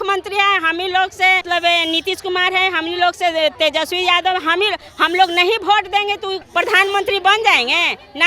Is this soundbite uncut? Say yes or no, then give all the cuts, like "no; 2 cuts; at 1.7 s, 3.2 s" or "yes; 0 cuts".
no; 2 cuts; at 1.4 s, 6.4 s